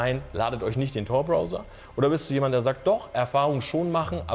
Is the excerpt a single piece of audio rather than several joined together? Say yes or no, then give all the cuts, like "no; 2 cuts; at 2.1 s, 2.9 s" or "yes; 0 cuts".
yes; 0 cuts